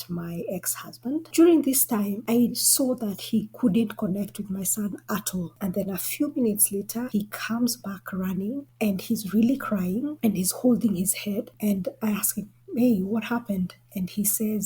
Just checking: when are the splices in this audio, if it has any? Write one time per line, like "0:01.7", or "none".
0:01.3
0:05.5
0:07.1